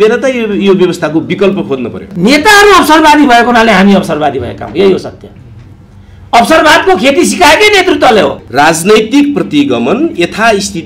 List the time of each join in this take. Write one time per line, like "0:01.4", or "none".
0:02.0
0:08.4